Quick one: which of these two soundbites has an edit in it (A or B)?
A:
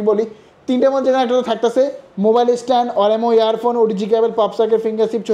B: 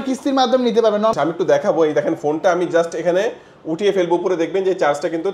B